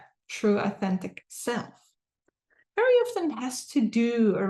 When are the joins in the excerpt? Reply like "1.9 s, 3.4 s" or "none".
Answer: none